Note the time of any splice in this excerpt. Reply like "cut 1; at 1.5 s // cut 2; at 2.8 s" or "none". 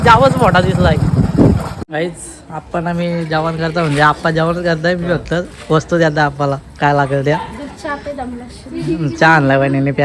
cut 1; at 1.8 s